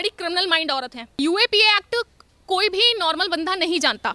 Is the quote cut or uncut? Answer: cut